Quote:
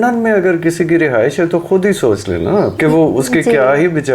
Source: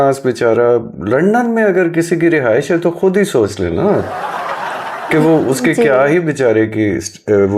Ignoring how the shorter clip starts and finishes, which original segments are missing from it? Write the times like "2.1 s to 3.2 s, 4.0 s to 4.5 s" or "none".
4.1 s to 5.1 s